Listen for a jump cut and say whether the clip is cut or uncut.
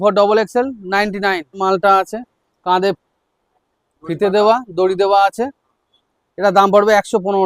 cut